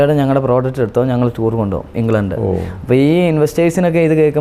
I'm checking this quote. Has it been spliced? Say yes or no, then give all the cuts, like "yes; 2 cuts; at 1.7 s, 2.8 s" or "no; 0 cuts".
no; 0 cuts